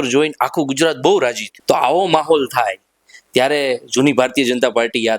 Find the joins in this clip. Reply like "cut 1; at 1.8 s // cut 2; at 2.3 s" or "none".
cut 1; at 1.5 s